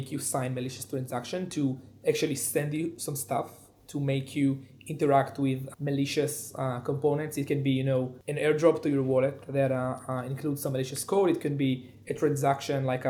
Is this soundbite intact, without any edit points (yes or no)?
yes